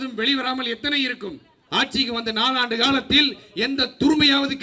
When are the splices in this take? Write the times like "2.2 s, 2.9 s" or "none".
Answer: 1.5 s